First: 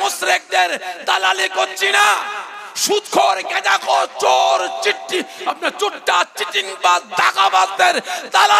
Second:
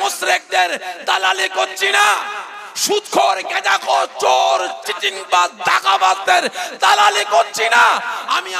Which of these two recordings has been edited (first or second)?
second